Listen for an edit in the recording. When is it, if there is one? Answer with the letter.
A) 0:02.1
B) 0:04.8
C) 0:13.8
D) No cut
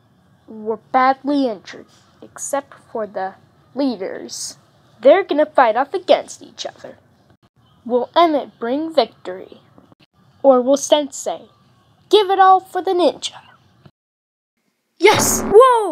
D